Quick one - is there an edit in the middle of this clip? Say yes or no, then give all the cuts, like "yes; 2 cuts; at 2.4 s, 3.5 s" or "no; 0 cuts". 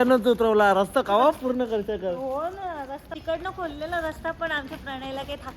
yes; 1 cut; at 3.1 s